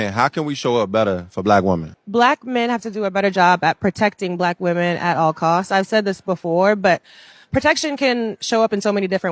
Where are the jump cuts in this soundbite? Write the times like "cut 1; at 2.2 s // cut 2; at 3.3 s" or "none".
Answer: cut 1; at 5.9 s